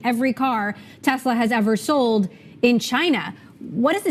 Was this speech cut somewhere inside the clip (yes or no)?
no